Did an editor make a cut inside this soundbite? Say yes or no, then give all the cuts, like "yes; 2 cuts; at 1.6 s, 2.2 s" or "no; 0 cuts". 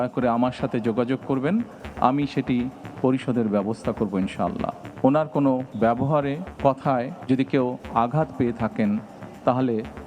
yes; 3 cuts; at 4.8 s, 6.0 s, 7.1 s